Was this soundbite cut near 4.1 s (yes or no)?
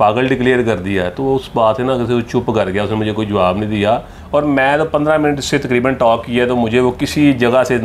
yes